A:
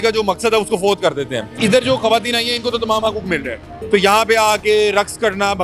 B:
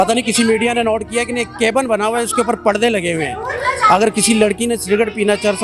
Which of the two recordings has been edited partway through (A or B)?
A